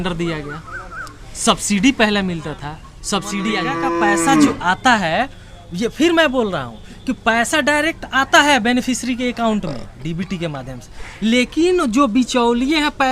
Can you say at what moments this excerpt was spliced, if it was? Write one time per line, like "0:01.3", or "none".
0:03.7